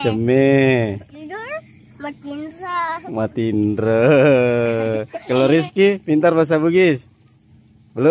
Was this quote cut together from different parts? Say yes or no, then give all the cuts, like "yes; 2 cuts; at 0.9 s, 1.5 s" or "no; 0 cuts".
yes; 1 cut; at 1.1 s